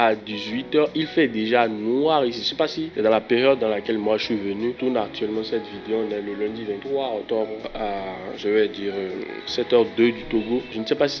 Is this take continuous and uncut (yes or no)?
yes